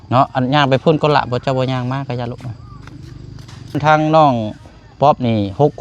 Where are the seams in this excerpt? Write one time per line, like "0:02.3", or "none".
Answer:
0:03.8